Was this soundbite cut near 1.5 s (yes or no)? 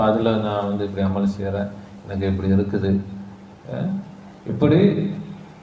no